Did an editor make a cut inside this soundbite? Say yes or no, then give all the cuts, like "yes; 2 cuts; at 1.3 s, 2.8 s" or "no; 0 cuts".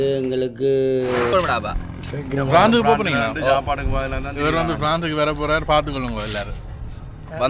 yes; 1 cut; at 1.3 s